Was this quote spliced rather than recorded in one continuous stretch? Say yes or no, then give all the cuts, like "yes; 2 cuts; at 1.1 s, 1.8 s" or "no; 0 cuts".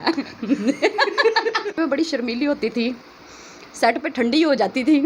yes; 1 cut; at 1.8 s